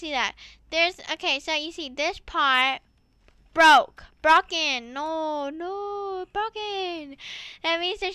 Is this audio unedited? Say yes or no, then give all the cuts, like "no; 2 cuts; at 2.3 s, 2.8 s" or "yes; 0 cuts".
yes; 0 cuts